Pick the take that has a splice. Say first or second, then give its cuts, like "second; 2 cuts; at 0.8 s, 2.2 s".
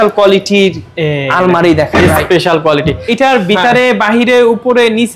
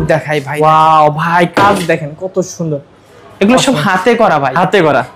first; 1 cut; at 3.0 s